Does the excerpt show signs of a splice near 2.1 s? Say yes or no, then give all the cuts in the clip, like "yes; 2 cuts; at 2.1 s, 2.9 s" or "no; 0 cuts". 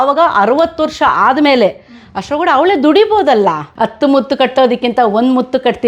no; 1 cut; at 3.7 s